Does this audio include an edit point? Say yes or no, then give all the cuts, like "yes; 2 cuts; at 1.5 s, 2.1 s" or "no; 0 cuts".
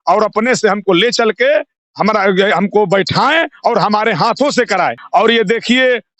yes; 1 cut; at 5.0 s